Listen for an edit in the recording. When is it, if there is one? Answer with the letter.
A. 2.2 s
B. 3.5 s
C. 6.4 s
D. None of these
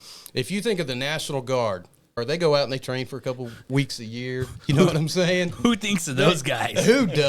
A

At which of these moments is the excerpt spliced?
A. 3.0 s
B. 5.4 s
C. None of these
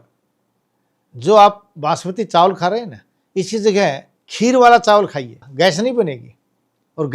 B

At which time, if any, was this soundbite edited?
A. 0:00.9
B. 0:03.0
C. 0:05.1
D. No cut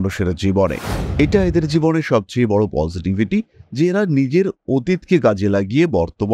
A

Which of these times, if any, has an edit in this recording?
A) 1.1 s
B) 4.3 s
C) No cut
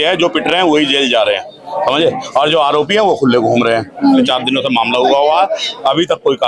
B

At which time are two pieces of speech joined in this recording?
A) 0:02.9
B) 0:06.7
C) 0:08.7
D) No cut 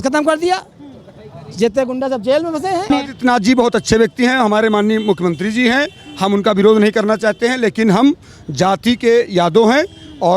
A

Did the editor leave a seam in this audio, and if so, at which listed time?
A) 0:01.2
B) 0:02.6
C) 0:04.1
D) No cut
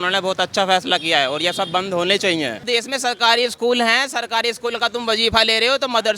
B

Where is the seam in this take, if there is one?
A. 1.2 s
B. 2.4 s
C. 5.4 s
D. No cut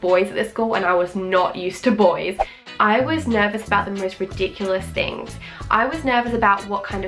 B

